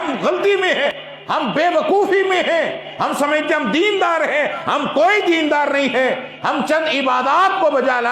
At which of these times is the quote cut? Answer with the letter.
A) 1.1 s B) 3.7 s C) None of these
A